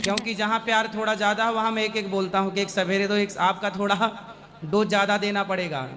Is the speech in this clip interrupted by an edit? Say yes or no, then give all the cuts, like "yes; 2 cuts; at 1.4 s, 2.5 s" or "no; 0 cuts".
no; 0 cuts